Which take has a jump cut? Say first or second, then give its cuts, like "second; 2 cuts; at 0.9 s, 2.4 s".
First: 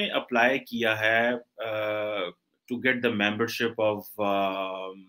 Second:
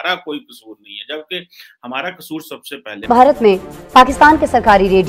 second; 1 cut; at 3.0 s